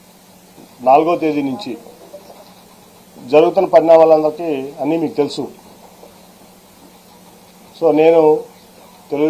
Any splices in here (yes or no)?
yes